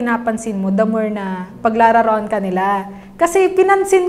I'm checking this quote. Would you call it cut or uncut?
uncut